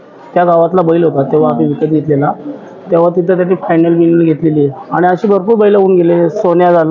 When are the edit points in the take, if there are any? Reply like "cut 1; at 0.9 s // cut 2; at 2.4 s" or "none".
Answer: none